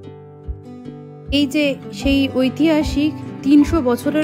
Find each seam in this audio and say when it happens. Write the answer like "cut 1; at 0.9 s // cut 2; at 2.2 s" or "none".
cut 1; at 1.3 s